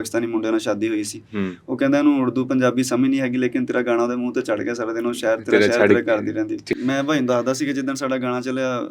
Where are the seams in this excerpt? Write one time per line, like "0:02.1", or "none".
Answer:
0:06.7